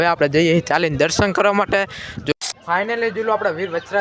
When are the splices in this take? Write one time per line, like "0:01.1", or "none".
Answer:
0:02.3

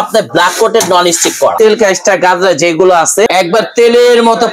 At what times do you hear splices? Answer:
0:01.5
0:03.3

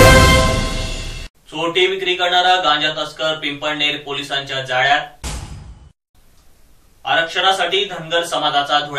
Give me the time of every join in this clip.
0:01.2

